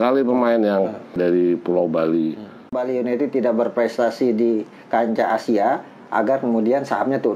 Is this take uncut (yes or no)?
no